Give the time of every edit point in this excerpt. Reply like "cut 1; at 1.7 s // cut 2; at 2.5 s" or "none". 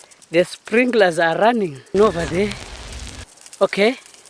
cut 1; at 1.9 s